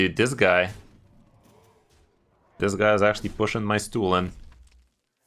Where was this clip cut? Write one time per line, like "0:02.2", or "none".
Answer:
0:02.6